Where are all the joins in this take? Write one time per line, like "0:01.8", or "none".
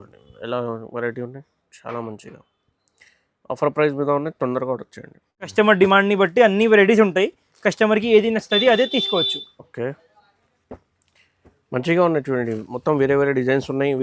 0:05.5